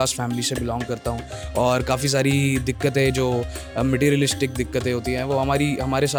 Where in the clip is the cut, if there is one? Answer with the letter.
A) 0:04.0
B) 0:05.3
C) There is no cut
C